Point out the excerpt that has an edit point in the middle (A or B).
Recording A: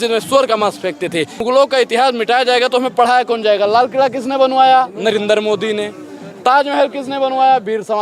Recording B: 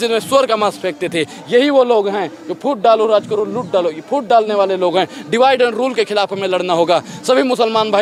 A